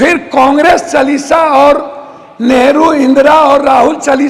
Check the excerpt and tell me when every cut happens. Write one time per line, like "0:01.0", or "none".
none